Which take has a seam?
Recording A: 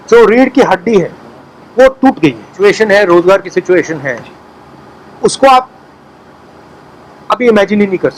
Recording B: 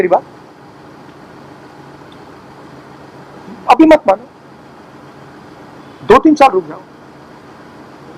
A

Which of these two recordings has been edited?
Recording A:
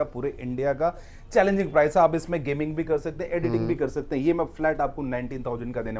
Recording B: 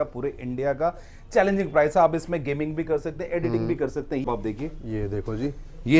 B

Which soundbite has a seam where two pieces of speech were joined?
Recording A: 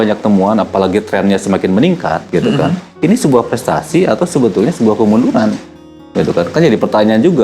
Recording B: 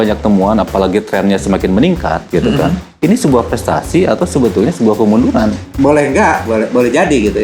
B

